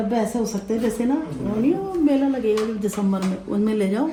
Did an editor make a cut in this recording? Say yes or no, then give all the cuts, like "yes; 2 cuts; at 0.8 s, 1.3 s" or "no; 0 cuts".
no; 0 cuts